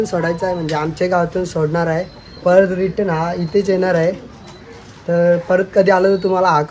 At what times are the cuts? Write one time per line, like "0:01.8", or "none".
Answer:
none